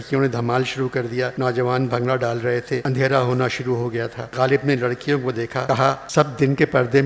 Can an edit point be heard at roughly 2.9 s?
yes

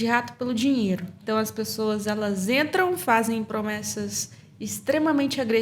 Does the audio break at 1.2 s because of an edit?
yes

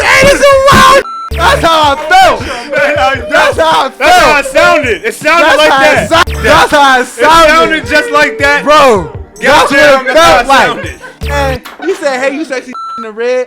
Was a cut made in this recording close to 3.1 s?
no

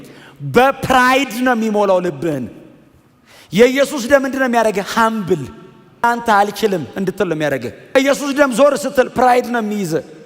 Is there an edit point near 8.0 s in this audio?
yes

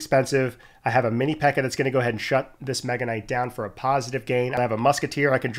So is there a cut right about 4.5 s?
yes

